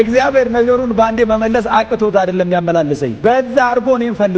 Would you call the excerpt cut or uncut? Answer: uncut